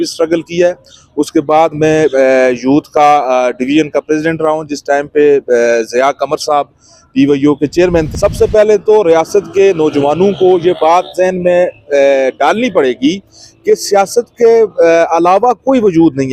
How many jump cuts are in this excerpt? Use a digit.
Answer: 1